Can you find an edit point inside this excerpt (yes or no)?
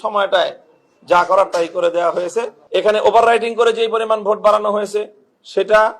yes